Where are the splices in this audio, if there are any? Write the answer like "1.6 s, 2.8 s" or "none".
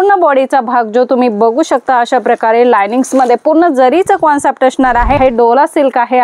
5.2 s